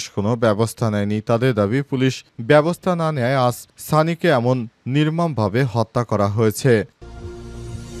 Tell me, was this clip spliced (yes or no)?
yes